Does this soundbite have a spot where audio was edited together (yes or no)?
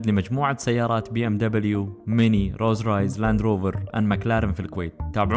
no